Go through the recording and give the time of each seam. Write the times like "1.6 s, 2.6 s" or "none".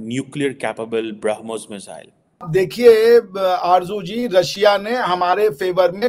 2.3 s